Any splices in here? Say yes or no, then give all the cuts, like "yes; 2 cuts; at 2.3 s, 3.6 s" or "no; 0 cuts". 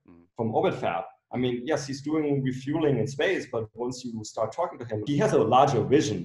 yes; 1 cut; at 5.0 s